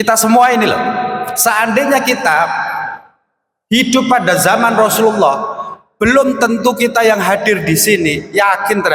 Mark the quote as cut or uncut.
uncut